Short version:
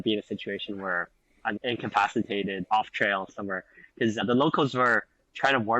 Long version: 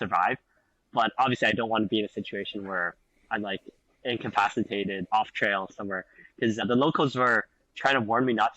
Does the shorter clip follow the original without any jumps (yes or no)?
no